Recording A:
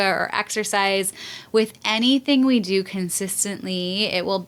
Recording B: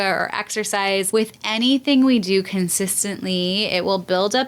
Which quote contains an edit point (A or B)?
B